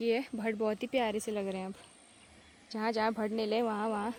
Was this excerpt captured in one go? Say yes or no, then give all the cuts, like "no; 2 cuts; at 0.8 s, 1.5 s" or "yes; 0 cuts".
yes; 0 cuts